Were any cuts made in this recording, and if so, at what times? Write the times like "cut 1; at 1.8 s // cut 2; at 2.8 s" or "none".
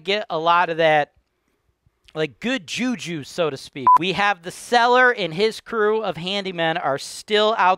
cut 1; at 3.8 s

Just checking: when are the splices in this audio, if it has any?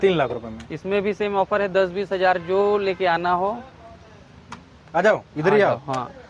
none

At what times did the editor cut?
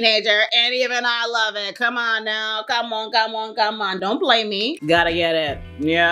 cut 1; at 4.7 s

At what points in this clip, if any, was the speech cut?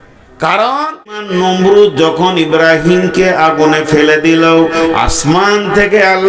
cut 1; at 1.2 s

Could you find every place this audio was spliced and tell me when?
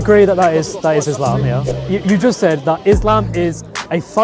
cut 1; at 1.7 s

